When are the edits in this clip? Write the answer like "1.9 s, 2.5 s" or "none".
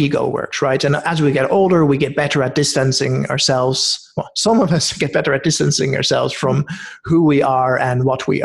none